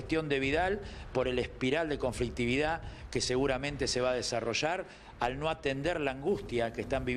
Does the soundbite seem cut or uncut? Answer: uncut